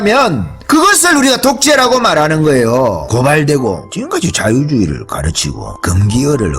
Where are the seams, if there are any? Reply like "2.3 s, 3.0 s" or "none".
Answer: 3.0 s, 3.9 s

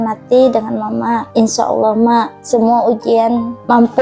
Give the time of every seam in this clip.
1.2 s, 2.4 s

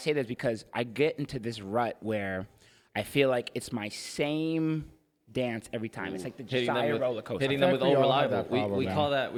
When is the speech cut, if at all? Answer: none

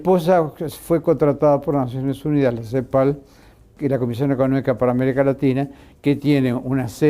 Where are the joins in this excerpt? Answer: 3.2 s

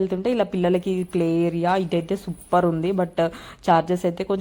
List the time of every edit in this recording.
none

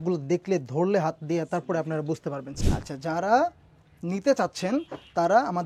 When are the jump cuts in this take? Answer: 2.5 s

